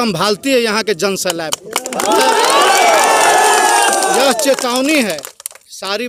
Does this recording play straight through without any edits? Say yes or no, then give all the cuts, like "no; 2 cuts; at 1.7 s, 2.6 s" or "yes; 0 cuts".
yes; 0 cuts